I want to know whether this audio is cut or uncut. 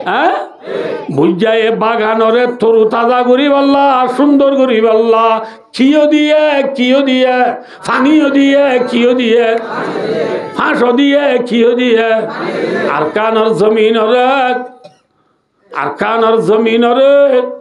uncut